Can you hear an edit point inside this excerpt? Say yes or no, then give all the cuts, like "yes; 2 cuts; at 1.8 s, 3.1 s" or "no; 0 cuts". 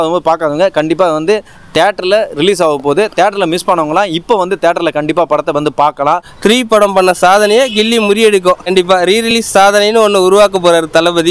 yes; 2 cuts; at 6.3 s, 8.7 s